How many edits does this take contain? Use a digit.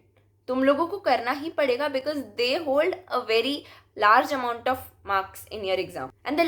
0